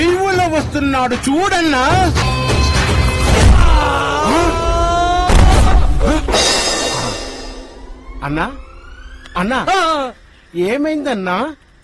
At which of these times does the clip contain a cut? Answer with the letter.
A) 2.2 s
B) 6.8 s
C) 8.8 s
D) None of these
A